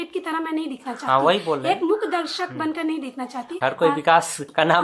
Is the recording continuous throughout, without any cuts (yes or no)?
no